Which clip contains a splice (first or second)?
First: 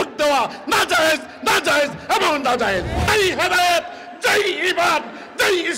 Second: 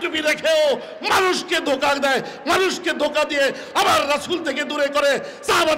first